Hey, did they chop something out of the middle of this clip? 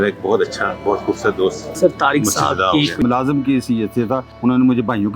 yes; 3 cuts; at 1.7 s, 3.0 s, 4.3 s

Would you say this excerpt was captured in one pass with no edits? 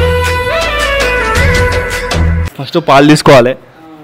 no; 1 cut; at 2.5 s

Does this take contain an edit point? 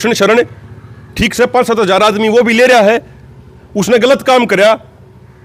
no; 0 cuts

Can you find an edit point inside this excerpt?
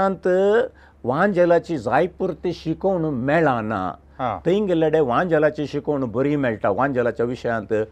no; 0 cuts

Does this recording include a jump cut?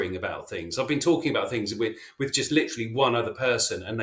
no; 0 cuts

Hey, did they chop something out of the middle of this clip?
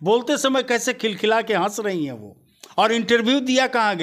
no; 0 cuts

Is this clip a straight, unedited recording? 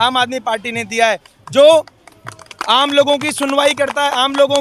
yes; 0 cuts

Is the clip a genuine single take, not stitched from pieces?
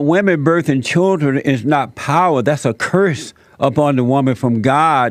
yes; 0 cuts

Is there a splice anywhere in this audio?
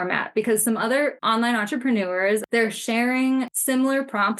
yes; 3 cuts; at 1.2 s, 2.4 s, 3.6 s

